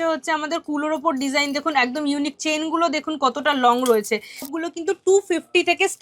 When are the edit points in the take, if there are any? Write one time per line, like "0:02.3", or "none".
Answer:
0:04.5

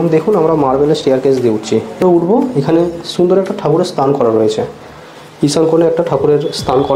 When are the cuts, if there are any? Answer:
0:02.0

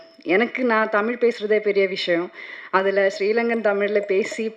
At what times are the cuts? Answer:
none

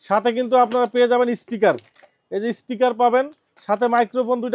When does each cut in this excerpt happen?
none

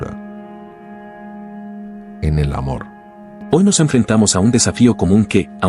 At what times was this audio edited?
0:03.3

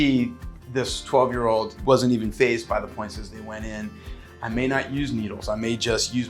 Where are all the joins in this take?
0:01.7
0:04.1

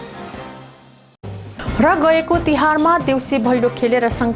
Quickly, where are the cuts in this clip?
0:00.9

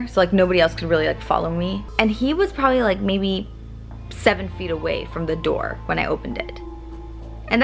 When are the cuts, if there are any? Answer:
0:01.8

